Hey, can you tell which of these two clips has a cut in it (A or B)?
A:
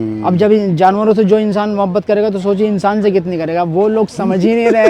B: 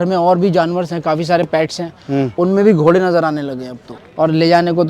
B